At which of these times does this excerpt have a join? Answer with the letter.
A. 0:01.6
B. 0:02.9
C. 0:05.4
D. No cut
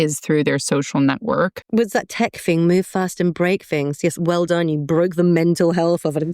A